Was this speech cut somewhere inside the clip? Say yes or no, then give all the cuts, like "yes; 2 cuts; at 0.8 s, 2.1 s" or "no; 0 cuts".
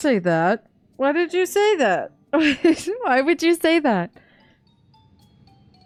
no; 0 cuts